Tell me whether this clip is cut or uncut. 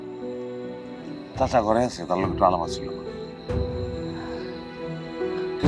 cut